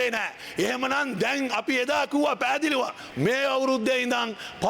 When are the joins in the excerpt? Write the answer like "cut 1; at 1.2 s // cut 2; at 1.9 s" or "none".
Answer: cut 1; at 3.0 s